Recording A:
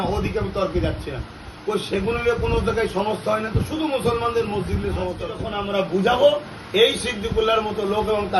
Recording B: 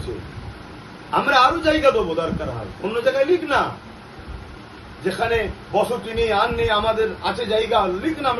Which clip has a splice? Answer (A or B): A